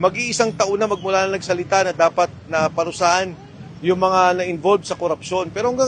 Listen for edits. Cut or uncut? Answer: uncut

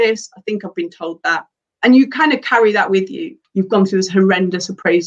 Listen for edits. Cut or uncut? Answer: cut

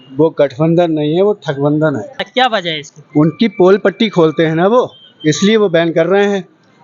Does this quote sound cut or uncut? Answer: cut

